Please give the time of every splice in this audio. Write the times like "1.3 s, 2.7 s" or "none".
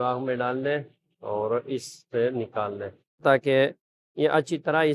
3.2 s